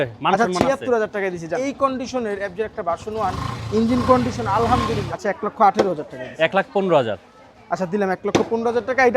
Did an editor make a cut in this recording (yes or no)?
yes